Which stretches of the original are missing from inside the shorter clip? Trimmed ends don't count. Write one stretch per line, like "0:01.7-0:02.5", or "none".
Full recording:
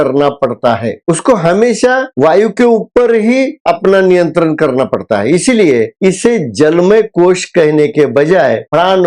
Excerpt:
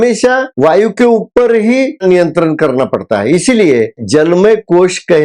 0:03.6-0:04.0
0:06.0-0:06.4

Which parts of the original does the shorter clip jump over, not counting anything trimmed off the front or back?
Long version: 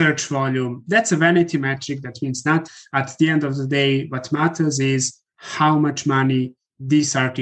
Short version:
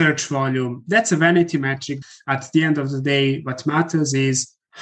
0:02.1-0:02.8

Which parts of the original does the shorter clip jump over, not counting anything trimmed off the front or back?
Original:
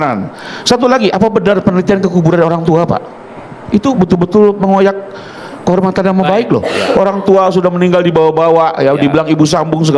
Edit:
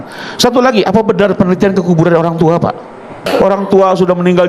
0:03.5-0:06.8

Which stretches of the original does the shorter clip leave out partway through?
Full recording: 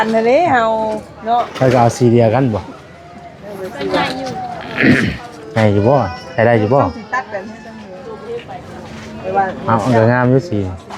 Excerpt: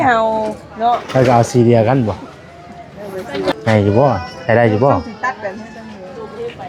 0:04.0-0:05.4

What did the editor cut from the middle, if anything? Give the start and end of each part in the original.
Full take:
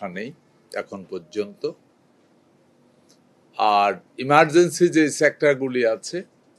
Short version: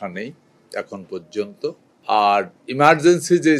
0:01.9-0:03.4

